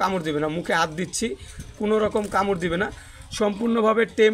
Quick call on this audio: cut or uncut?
uncut